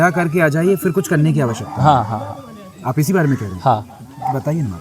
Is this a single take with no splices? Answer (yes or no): yes